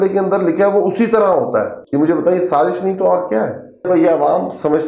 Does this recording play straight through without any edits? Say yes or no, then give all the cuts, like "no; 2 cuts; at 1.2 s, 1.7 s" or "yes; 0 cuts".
no; 2 cuts; at 1.8 s, 3.9 s